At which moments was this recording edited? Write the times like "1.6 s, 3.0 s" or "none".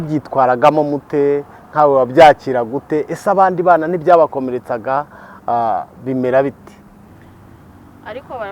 7.1 s